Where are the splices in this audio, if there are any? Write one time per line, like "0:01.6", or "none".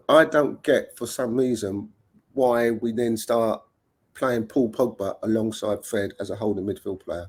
none